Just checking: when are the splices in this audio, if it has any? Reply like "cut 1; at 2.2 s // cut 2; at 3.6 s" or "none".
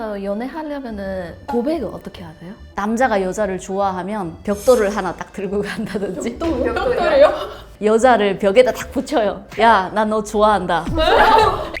cut 1; at 2.7 s